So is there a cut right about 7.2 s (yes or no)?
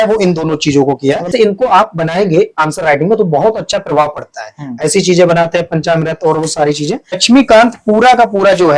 yes